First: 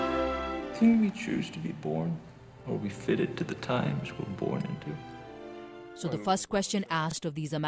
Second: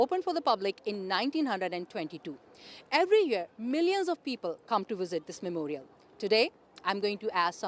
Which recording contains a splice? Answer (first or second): second